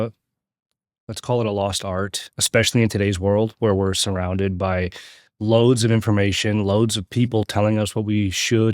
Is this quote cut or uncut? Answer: cut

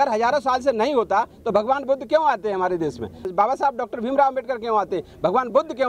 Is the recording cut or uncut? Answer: cut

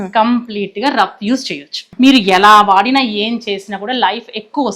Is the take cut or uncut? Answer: cut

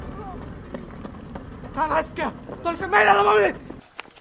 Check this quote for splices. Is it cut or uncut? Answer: uncut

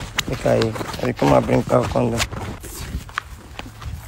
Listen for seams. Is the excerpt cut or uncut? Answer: cut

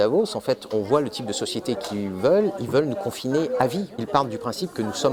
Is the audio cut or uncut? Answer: cut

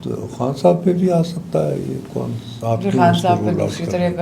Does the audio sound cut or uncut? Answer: uncut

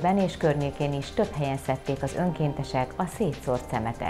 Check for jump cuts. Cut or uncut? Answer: uncut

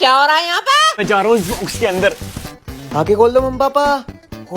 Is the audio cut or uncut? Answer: cut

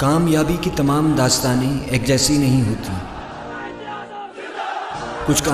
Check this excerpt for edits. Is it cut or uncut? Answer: cut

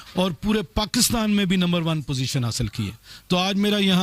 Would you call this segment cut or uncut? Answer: uncut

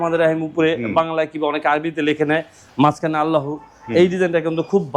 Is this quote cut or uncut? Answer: uncut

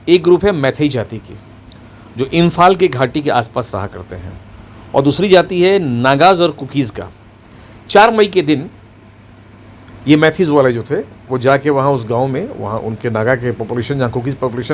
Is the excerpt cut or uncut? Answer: uncut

